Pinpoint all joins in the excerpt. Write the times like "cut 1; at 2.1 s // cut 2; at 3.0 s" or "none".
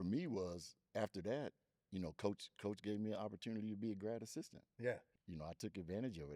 cut 1; at 5.2 s